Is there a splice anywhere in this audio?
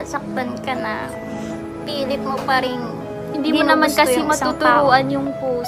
no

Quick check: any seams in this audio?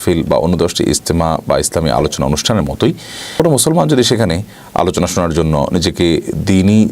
yes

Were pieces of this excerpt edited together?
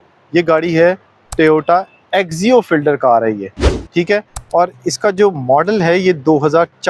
no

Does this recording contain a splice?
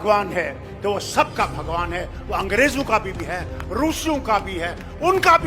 no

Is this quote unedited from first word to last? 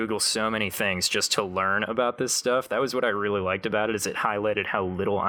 yes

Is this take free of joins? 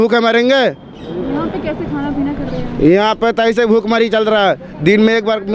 yes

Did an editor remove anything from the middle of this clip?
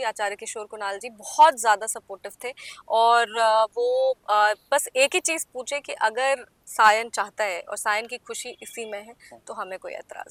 no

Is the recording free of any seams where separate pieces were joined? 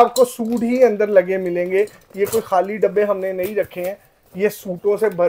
yes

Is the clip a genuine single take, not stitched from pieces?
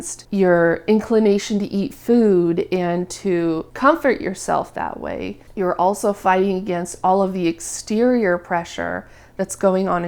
yes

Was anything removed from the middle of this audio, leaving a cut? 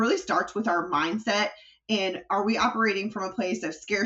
no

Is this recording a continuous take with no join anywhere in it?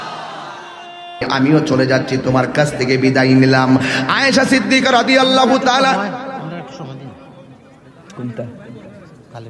no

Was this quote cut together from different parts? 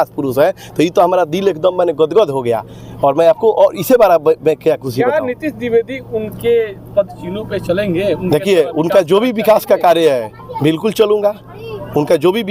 no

